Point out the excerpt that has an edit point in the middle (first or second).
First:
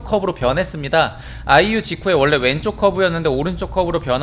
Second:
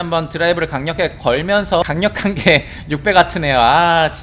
second